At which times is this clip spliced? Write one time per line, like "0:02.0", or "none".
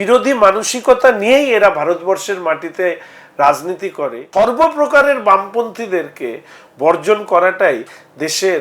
0:04.2